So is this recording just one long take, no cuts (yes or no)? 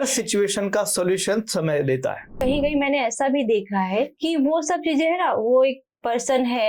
no